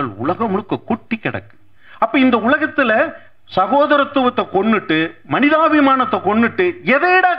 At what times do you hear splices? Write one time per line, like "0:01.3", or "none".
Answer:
none